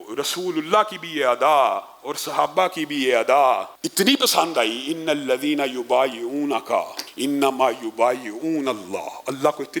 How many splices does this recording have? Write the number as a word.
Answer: two